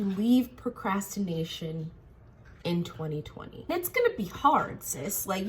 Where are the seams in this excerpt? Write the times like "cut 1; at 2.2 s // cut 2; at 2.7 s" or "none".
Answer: cut 1; at 3.7 s